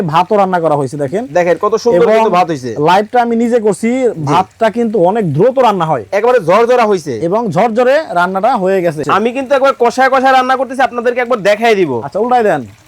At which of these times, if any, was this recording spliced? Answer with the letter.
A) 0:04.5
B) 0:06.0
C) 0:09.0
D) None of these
C